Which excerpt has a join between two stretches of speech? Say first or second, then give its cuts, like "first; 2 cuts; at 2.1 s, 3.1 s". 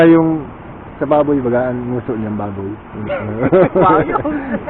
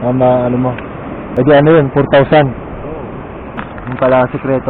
second; 2 cuts; at 1.2 s, 3.7 s